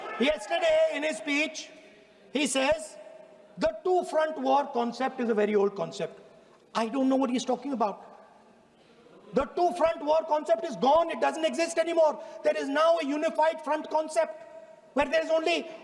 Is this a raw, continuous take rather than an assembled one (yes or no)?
yes